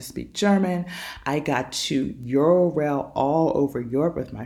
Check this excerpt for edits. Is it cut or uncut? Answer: uncut